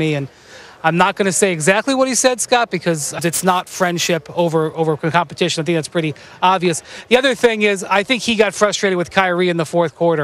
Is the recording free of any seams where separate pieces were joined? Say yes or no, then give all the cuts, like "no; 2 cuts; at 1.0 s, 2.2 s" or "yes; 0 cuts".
yes; 0 cuts